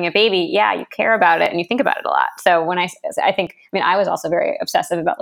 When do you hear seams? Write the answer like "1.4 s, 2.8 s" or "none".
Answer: none